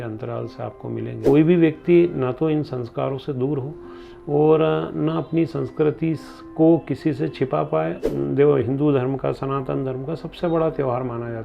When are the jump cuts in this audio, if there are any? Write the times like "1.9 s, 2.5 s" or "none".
1.2 s, 8.0 s